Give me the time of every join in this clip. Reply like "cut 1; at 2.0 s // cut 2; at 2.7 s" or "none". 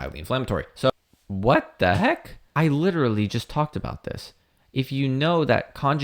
cut 1; at 0.9 s // cut 2; at 2.5 s